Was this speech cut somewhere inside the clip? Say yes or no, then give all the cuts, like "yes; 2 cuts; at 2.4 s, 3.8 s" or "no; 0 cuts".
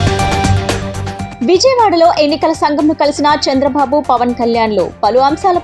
yes; 1 cut; at 1.2 s